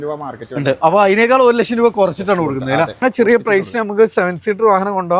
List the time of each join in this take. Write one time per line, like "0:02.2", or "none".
0:03.0